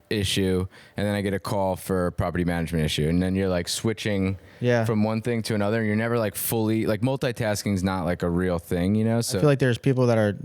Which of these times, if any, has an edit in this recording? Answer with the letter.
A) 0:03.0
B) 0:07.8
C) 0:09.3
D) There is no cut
C